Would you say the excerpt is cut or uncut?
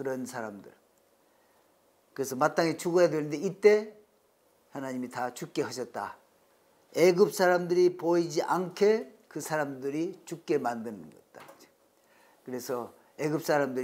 uncut